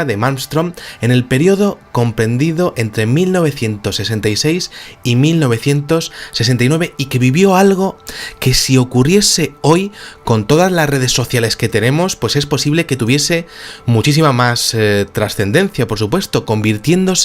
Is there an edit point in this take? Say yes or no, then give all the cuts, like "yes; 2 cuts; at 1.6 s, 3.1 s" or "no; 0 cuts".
yes; 1 cut; at 1.4 s